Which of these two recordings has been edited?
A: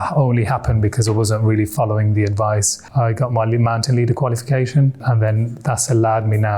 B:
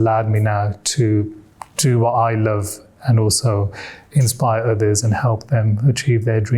A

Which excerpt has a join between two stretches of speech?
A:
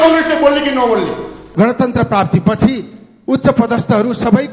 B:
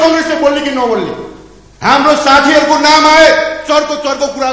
A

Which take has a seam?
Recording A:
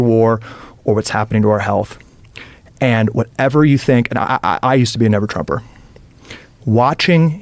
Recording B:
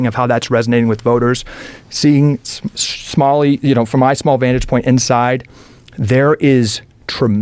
B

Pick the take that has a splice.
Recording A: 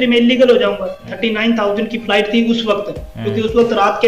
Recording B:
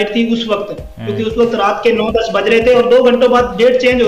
A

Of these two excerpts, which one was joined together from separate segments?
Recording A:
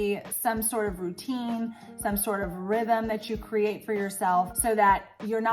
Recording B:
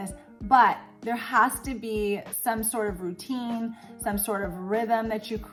A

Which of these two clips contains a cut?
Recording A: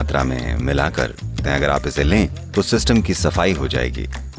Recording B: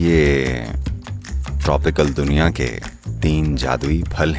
A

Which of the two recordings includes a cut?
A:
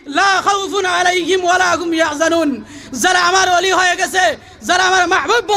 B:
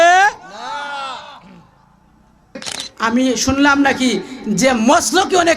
B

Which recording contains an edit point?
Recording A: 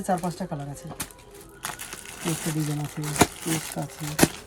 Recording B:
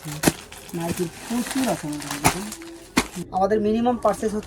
B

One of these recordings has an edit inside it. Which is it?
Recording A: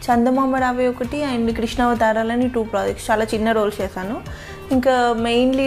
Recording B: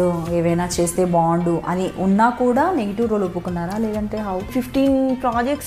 B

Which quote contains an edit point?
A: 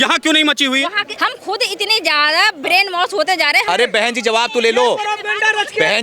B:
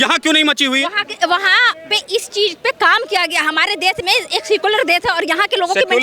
A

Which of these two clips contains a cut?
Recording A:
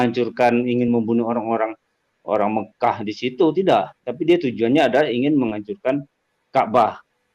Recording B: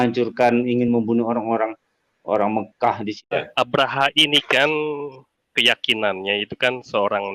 B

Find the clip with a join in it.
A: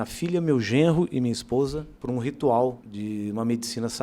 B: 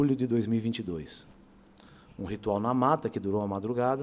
A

